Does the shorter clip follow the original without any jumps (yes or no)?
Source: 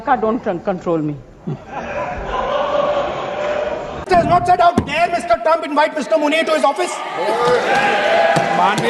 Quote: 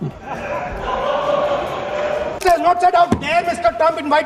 no